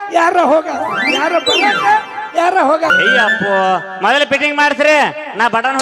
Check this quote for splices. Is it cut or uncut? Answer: cut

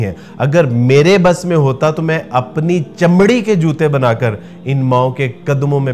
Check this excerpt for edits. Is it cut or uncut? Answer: uncut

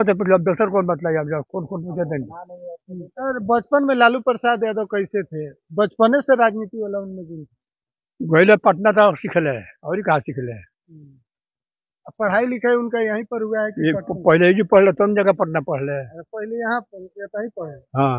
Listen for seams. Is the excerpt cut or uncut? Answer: cut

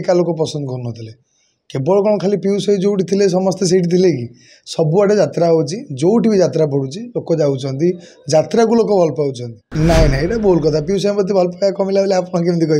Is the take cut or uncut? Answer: cut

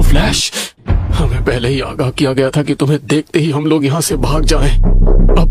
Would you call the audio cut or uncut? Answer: uncut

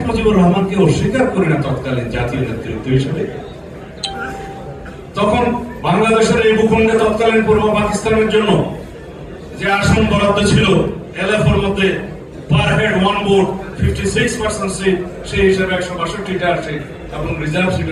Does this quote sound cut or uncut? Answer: uncut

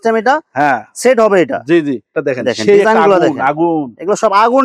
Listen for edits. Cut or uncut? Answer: cut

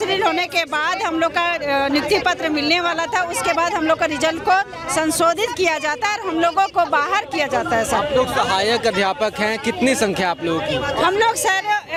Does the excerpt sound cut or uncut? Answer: uncut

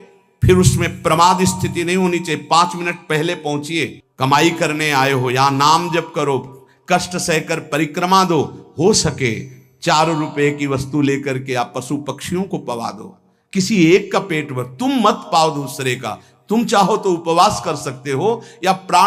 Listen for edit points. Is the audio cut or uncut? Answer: cut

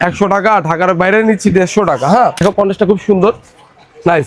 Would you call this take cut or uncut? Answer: cut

